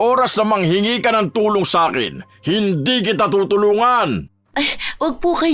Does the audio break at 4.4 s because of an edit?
yes; 1 cut; at 4.4 s

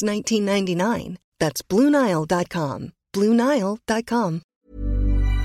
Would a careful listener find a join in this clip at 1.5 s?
no; 1 cut; at 4.4 s

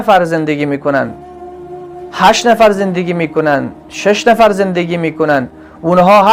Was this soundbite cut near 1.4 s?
no; 0 cuts

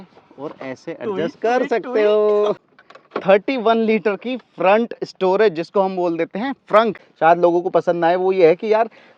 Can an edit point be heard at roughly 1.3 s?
no; 2 cuts; at 2.6 s, 7.1 s

